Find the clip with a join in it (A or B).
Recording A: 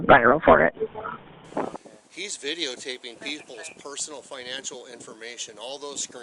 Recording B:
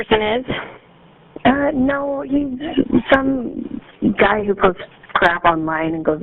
A